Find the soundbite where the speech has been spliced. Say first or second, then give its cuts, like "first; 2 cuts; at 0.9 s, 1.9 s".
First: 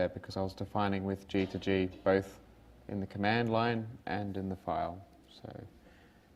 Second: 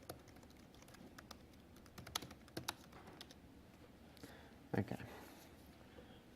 second; 1 cut; at 4.1 s